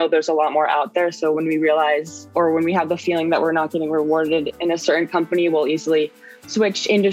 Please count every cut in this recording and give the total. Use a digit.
0